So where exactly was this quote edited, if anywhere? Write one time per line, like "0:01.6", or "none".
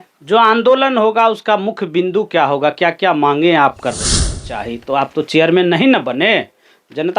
0:04.4